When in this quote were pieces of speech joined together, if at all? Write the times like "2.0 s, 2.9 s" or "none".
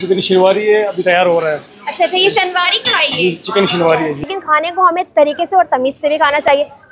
4.3 s